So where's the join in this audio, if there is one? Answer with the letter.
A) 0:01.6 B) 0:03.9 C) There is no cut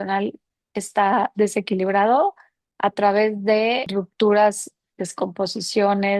B